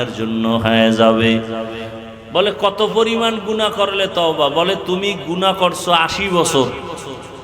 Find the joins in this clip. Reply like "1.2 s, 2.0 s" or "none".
1.8 s